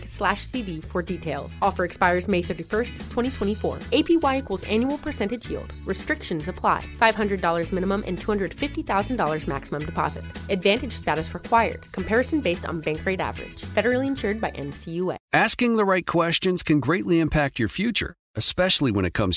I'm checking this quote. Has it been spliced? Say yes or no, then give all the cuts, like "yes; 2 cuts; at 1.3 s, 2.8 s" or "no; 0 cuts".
yes; 1 cut; at 15.2 s